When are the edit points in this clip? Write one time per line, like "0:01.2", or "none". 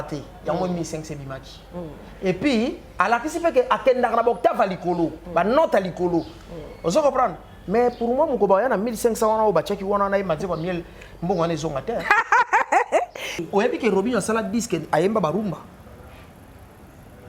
0:13.4